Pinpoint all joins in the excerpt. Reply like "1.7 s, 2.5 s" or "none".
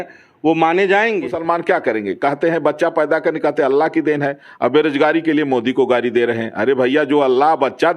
1.3 s